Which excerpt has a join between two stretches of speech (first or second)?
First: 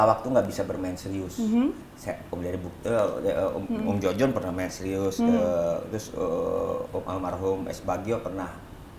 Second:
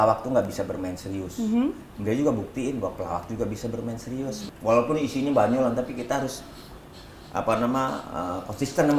second